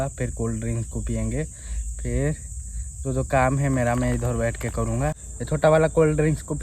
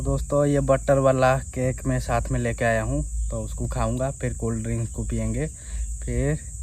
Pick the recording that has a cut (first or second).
first